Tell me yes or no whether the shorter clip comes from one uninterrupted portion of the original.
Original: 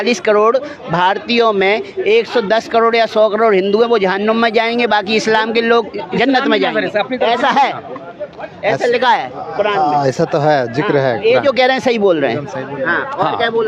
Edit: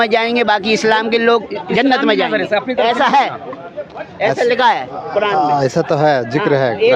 yes